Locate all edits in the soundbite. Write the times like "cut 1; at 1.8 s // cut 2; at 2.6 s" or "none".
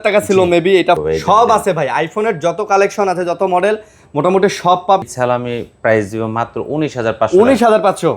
cut 1; at 1.0 s // cut 2; at 5.0 s